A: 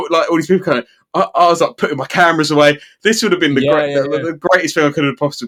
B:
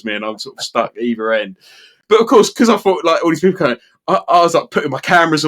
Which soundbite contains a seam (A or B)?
B